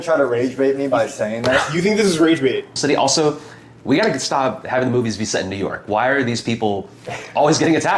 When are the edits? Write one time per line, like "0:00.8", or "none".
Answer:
0:02.7